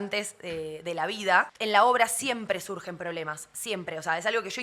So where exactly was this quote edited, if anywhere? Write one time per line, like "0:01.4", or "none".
0:01.5

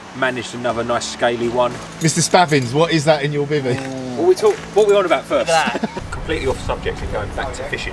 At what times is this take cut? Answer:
0:01.8
0:05.9

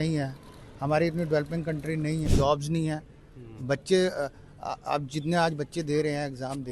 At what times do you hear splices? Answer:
0:02.3

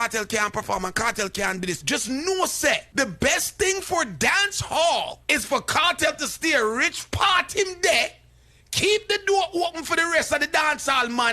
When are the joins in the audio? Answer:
0:01.8
0:02.9
0:05.2

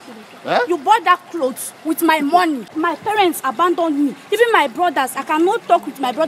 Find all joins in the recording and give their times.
0:02.7

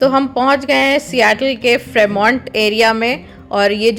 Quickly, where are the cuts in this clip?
none

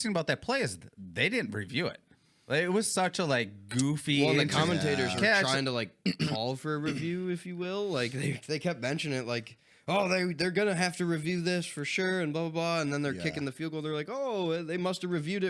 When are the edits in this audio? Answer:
none

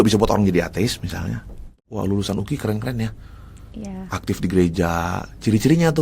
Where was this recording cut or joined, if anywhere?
0:01.8

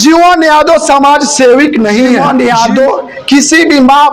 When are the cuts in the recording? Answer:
0:02.2

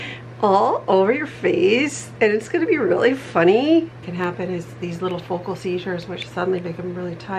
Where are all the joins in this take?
0:04.1

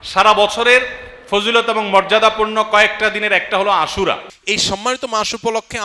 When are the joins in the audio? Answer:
0:04.3

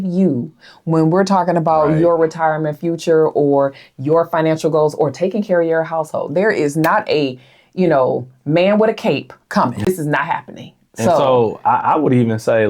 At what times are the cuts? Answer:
0:09.9

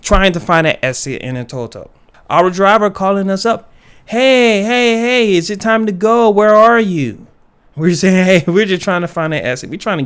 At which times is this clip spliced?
none

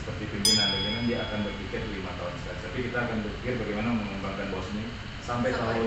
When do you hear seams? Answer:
none

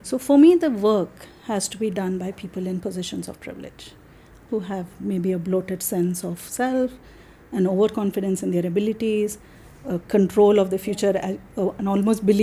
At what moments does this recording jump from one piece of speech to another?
0:04.4

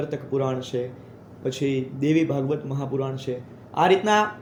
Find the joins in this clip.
none

